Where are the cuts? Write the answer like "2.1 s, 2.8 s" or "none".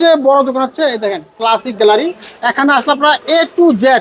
none